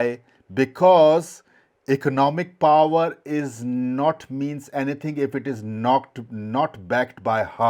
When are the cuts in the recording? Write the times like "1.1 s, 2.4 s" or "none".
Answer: none